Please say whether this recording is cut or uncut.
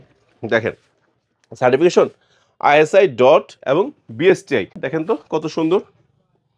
cut